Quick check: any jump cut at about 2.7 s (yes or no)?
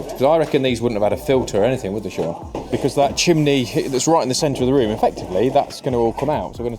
yes